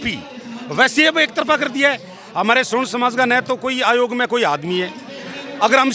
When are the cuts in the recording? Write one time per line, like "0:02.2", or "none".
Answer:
none